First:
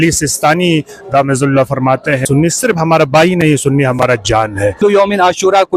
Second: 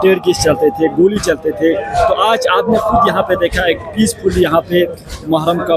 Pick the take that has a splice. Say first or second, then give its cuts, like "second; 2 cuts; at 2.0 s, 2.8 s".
first; 2 cuts; at 2.2 s, 4.8 s